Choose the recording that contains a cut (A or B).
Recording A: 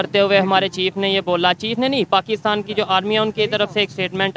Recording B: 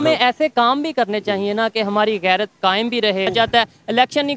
B